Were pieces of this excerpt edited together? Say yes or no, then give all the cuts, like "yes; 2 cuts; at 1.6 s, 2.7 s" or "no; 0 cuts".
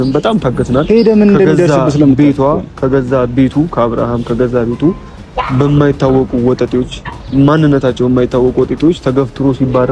no; 0 cuts